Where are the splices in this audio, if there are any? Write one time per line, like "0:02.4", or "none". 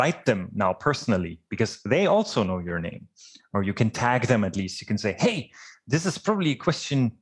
none